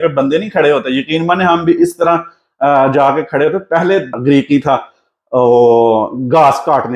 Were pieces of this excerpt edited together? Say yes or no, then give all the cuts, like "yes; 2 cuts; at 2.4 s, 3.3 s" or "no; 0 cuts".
yes; 1 cut; at 4.2 s